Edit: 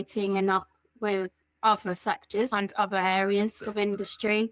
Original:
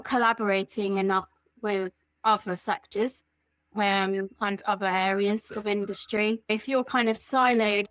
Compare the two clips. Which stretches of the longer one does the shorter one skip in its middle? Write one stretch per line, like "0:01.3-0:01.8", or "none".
0:03.1-0:04.4